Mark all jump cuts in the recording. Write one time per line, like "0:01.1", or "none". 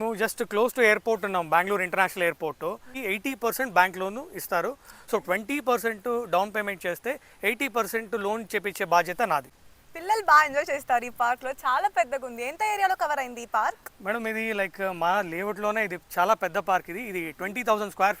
0:02.9
0:09.5